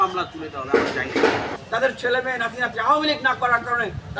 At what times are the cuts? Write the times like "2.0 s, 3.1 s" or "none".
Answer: 1.6 s